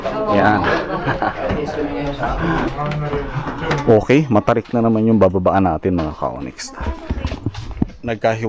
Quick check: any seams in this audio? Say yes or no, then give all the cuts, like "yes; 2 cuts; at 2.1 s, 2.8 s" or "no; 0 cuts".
yes; 1 cut; at 3.8 s